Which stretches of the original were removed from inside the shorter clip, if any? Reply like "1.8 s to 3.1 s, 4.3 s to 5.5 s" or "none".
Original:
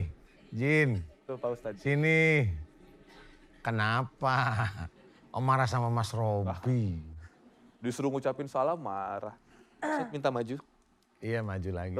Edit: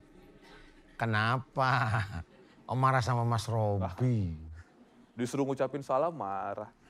none